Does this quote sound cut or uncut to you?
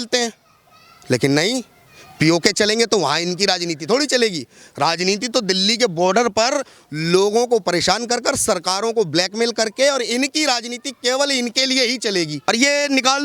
cut